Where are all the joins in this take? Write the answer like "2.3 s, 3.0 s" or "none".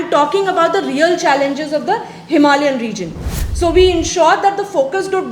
3.3 s